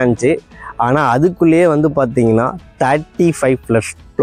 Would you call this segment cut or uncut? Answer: uncut